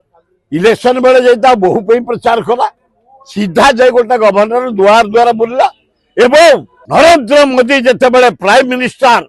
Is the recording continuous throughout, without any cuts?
no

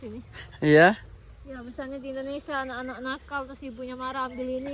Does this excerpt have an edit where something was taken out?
no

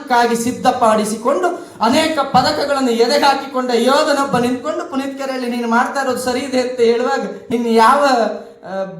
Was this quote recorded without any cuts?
no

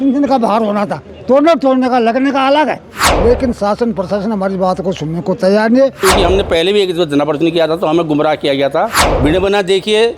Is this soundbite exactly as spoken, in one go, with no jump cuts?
no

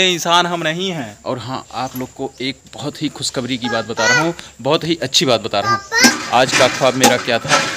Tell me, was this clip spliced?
yes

